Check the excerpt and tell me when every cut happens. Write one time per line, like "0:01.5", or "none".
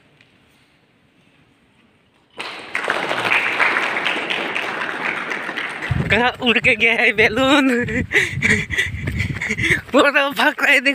0:05.9